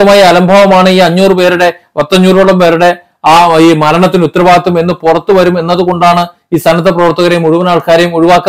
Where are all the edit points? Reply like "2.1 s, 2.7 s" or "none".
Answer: none